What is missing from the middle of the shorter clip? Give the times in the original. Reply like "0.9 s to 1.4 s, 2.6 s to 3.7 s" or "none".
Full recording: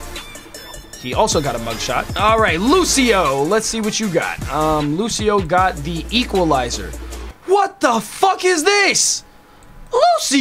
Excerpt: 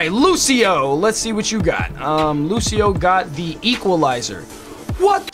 none